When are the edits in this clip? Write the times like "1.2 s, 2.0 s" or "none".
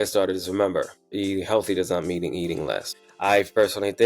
1.1 s, 2.9 s